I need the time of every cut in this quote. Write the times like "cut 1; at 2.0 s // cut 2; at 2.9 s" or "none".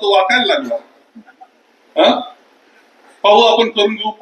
none